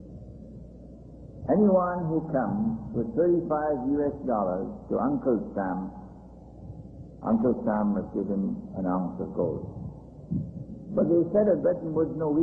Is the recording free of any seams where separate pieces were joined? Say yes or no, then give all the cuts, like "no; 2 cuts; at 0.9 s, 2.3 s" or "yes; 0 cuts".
no; 1 cut; at 6.0 s